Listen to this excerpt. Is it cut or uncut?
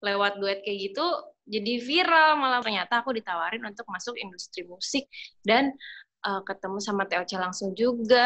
cut